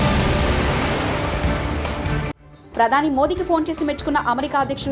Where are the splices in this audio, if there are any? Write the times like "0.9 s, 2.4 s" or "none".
2.5 s